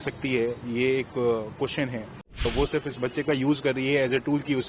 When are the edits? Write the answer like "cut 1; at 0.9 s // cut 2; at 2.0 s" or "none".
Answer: cut 1; at 2.5 s